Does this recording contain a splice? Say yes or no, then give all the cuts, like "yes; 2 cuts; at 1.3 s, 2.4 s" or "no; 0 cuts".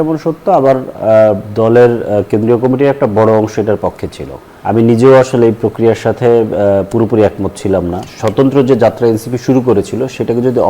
yes; 2 cuts; at 4.5 s, 8.1 s